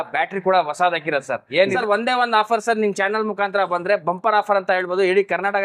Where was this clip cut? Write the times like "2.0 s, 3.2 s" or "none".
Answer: 1.7 s